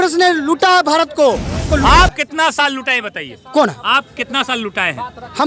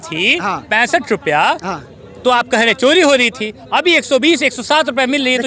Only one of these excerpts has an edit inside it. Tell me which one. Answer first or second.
first